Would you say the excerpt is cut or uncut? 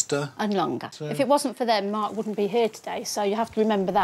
cut